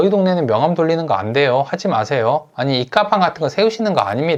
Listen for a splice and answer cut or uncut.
uncut